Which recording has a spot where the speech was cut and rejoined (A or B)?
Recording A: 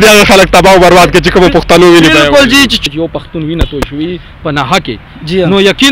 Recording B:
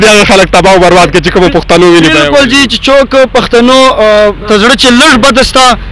A